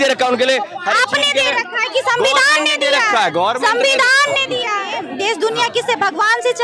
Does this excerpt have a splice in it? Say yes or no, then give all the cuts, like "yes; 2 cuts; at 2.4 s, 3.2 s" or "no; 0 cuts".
yes; 1 cut; at 5.0 s